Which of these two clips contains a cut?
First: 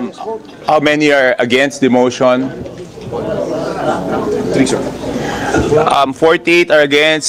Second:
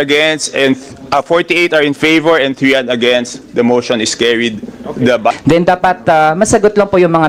second; 1 cut; at 5.4 s

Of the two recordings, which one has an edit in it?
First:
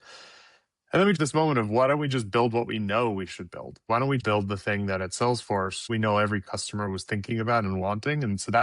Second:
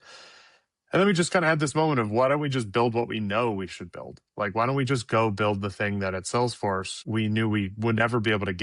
first; 3 cuts; at 1.2 s, 4.2 s, 5.9 s

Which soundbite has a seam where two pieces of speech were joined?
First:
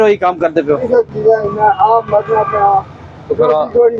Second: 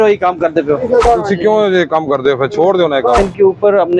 second; 2 cuts; at 1.0 s, 3.2 s

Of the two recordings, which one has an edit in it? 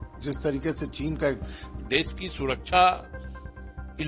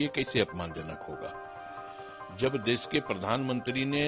first; 1 cut; at 1.7 s

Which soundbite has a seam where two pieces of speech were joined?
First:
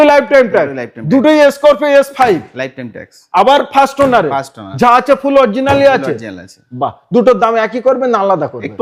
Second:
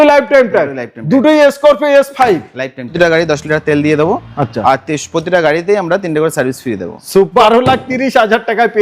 second; 2 cuts; at 2.9 s, 7.3 s

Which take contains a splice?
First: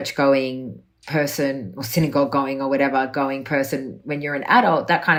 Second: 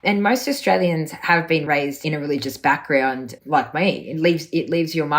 second; 2 cuts; at 1.7 s, 3.3 s

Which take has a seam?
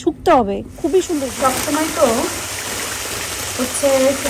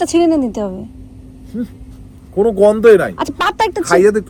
first; 1 cut; at 1.3 s

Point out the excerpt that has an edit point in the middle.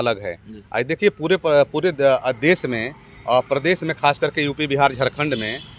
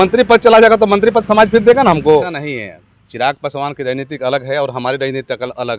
second; 1 cut; at 2.4 s

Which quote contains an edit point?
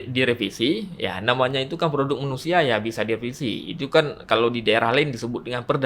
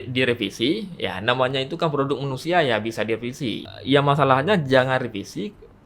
second; 1 cut; at 3.7 s

